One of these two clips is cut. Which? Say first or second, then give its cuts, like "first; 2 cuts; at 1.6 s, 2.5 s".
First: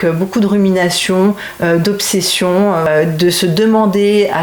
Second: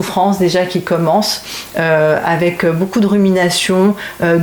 first; 1 cut; at 2.9 s